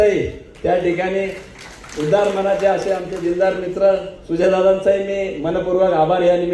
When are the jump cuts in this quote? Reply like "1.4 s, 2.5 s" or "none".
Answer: none